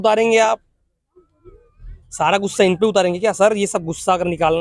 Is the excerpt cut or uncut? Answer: uncut